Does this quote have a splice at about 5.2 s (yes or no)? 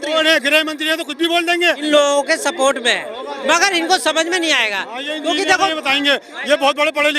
no